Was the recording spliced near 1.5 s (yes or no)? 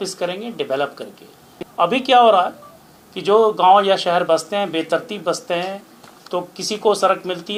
no